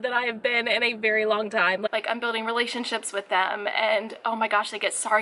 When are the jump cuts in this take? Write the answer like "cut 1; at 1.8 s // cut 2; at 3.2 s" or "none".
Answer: cut 1; at 1.9 s